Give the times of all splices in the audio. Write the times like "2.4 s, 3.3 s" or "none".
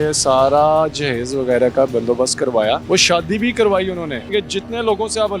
2.8 s, 4.2 s